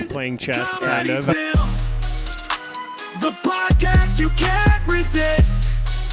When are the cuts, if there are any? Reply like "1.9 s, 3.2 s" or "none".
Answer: 1.3 s